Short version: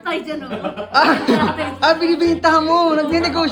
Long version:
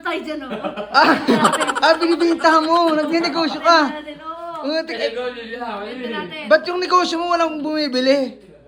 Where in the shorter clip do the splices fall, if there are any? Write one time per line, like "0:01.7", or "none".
none